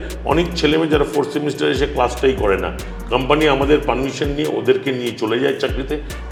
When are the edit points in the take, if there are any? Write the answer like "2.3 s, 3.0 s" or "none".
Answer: none